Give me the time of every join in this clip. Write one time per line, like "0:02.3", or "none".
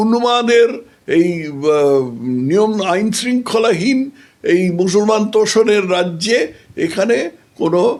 none